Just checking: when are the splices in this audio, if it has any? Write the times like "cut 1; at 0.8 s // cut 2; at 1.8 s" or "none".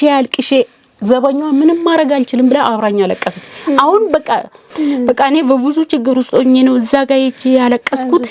cut 1; at 4.7 s